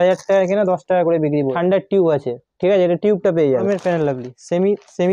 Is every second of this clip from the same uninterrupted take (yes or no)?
no